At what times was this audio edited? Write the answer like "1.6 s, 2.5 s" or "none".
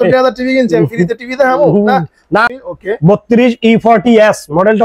2.5 s